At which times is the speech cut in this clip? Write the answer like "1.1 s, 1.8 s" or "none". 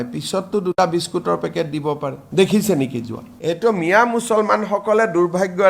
3.3 s